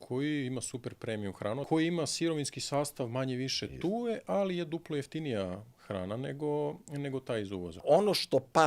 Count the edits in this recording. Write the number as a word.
two